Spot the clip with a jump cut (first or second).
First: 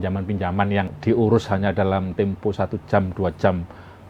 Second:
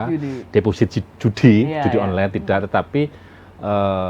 first